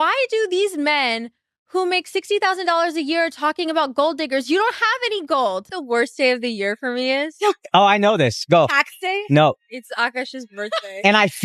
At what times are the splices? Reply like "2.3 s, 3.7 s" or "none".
5.8 s